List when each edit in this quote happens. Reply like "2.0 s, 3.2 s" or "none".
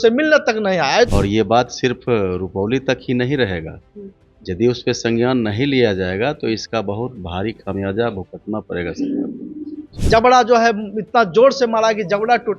1.1 s, 9.9 s